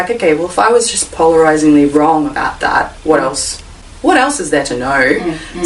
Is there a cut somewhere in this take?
no; 0 cuts

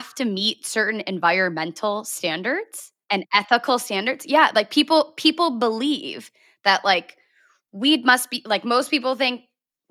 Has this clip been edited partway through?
no; 0 cuts

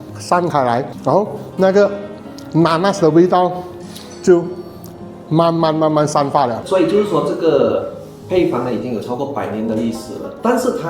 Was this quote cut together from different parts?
yes; 2 cuts; at 0.9 s, 6.6 s

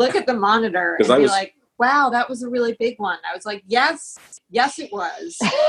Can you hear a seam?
no; 0 cuts

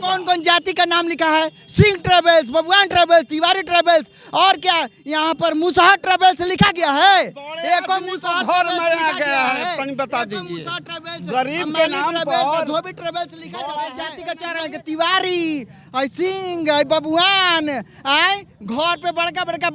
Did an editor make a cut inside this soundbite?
yes; 1 cut; at 14.2 s

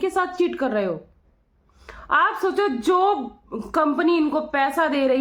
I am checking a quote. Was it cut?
no; 0 cuts

